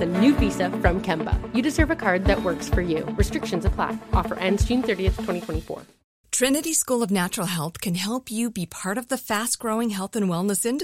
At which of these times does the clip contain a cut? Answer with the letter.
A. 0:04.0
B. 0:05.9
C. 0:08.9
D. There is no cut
B